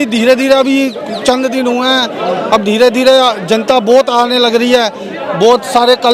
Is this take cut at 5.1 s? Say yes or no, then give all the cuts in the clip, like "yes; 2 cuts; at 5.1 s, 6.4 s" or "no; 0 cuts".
no; 0 cuts